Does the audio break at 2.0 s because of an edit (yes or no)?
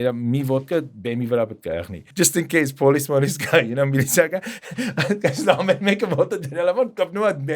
yes